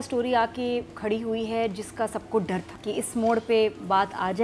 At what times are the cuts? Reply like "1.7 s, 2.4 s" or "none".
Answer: 2.7 s